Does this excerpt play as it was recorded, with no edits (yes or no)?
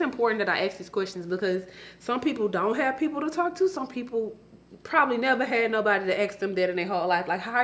yes